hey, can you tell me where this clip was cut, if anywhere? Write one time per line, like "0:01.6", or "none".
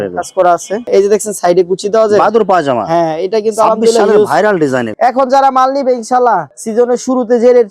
0:00.8
0:04.9